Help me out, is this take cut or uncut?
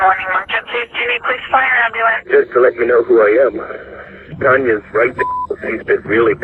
uncut